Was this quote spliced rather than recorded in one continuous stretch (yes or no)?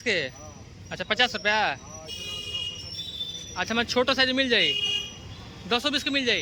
no